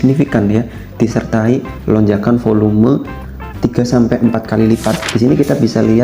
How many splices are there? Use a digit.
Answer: 1